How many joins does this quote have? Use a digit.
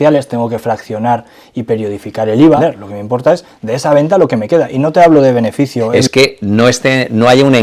2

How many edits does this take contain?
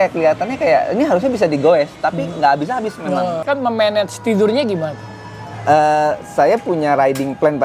1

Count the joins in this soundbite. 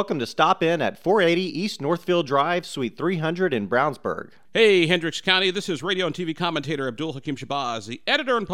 1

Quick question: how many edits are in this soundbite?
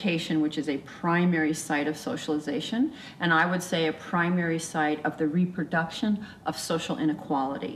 0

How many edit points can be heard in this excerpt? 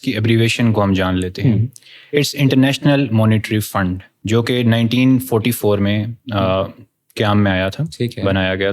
1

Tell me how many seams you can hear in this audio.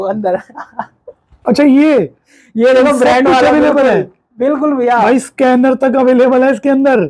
0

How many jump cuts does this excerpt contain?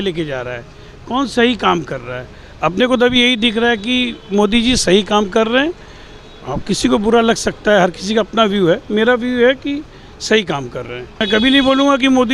1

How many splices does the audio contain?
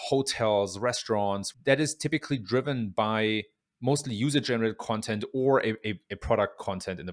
1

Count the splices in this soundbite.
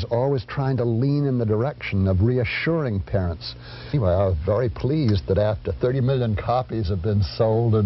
1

